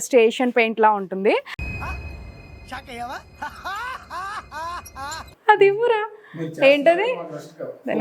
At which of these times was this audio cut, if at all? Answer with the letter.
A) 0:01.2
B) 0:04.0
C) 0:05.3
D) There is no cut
C